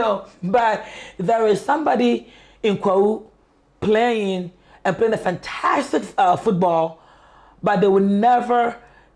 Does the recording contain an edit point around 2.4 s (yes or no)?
no